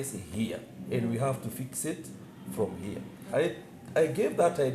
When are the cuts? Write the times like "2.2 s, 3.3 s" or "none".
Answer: 3.2 s